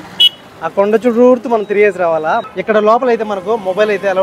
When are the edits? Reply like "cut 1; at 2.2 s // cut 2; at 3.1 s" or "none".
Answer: cut 1; at 2.5 s

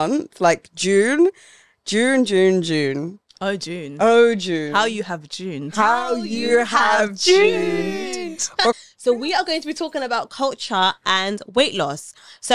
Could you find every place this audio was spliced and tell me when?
cut 1; at 8.8 s

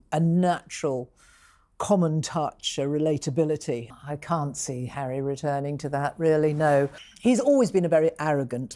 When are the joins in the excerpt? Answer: cut 1; at 3.9 s // cut 2; at 7.0 s

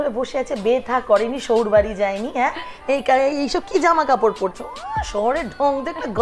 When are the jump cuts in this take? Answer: none

